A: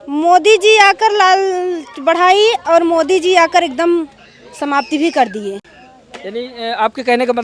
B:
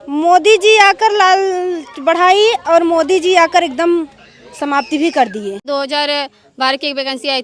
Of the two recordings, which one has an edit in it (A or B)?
B